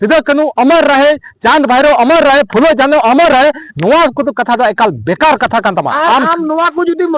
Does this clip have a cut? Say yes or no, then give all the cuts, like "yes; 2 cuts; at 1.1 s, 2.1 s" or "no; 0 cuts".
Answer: yes; 1 cut; at 5.9 s